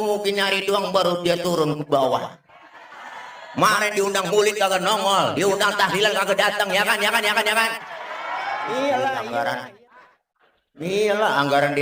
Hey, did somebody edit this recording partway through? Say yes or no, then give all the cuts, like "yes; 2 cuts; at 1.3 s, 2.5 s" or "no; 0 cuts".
yes; 1 cut; at 9.2 s